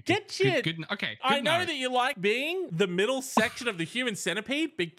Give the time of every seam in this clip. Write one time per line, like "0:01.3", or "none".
0:01.2
0:02.4